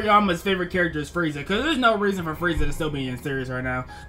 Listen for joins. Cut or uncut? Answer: uncut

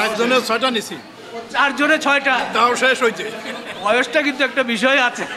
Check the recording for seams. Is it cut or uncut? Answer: uncut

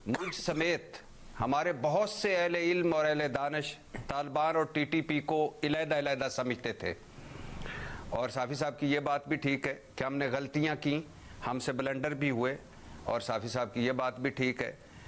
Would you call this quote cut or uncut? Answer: uncut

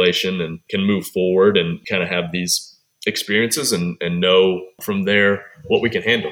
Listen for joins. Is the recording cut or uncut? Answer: cut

